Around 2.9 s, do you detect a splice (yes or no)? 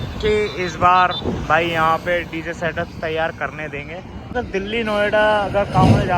no